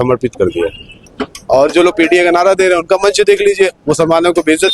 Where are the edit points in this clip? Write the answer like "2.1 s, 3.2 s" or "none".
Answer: 1.1 s

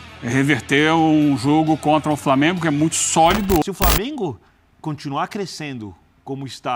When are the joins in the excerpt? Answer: 3.6 s

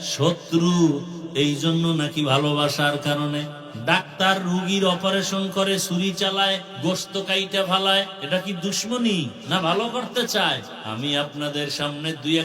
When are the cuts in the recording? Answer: 3.6 s, 6.7 s, 8.2 s, 9.4 s, 10.8 s

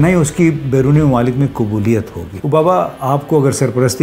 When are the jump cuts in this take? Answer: 2.3 s

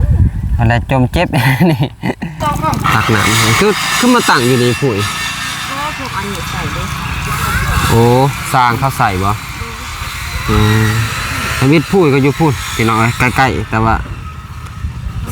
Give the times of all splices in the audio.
2.4 s

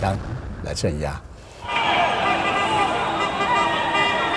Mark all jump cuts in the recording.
none

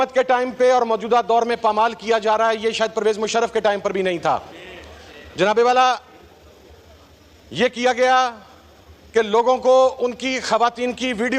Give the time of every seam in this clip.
none

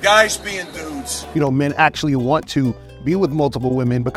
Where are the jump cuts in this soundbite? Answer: 1.3 s

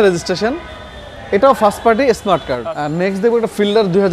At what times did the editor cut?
2.6 s

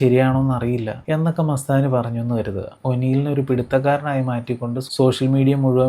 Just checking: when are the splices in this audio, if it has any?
0.9 s, 2.7 s

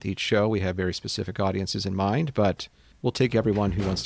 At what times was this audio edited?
2.8 s

